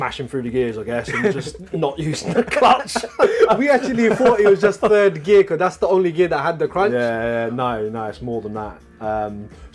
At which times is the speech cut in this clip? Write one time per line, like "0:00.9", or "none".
none